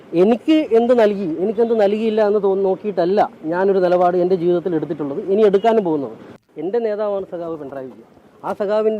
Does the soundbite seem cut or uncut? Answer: cut